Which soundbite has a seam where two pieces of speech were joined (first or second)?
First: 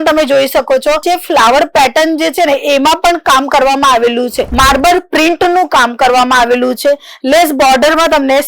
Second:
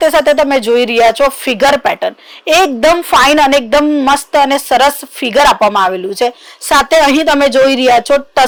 first